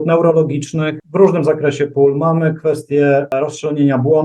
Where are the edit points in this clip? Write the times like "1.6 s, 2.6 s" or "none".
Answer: 1.0 s, 3.3 s